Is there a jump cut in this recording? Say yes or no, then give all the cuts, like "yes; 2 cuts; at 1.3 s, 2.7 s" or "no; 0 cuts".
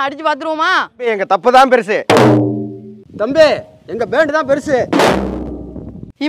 yes; 1 cut; at 1.1 s